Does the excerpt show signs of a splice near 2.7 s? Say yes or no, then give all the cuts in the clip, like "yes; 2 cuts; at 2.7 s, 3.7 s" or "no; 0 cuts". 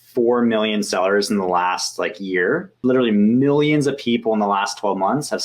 yes; 1 cut; at 2.7 s